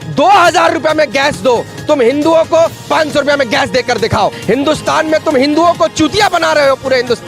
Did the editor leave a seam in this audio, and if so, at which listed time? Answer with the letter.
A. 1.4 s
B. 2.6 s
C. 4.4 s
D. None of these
C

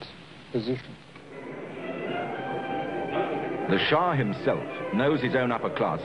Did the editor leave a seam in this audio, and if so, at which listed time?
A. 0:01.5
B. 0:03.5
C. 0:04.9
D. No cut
B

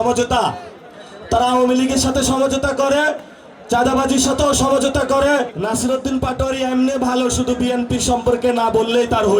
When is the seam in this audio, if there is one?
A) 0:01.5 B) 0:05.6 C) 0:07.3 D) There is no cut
B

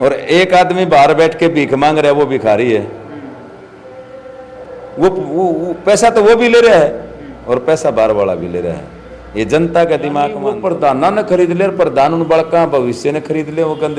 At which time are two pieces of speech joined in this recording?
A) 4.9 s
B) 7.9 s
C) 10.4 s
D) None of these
C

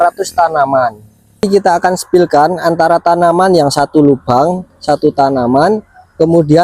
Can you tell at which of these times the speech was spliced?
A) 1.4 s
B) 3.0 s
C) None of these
A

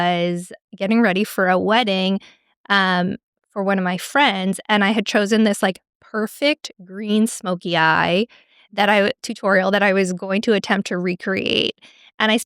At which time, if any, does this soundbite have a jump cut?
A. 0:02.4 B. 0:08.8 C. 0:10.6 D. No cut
D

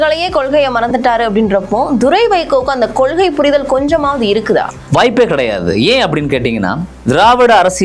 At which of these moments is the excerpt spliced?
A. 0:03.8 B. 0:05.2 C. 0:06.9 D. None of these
C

